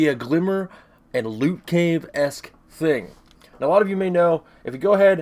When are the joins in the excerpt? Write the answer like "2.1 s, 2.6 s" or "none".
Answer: none